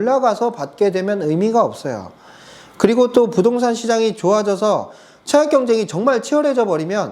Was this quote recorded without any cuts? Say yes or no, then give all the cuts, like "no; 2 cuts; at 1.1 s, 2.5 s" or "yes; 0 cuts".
yes; 0 cuts